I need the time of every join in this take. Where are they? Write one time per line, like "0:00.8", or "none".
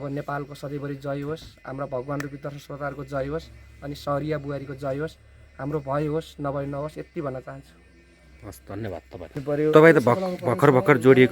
0:09.3